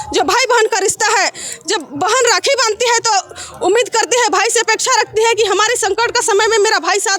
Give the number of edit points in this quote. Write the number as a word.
zero